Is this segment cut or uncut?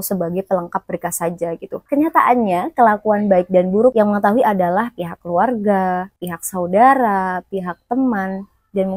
cut